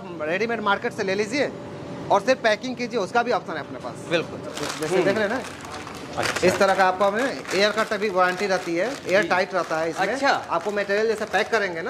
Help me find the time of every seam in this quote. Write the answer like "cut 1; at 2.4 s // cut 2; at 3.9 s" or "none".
cut 1; at 4.5 s